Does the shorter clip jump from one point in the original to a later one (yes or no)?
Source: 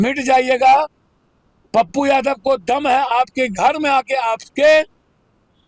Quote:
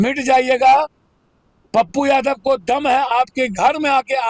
no